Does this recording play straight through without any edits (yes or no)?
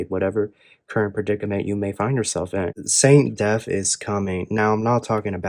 no